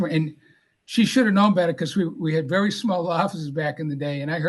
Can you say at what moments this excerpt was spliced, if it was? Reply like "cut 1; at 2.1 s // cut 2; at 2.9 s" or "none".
none